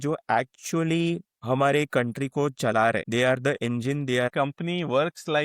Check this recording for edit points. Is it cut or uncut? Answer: cut